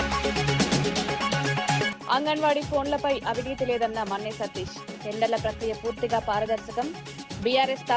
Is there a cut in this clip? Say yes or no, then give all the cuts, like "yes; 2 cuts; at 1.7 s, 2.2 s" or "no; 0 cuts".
yes; 1 cut; at 2.0 s